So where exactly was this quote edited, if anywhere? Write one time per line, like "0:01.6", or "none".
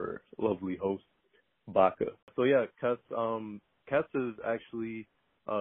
0:02.3